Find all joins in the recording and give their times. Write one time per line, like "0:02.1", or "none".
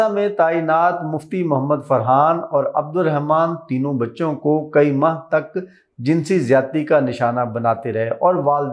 none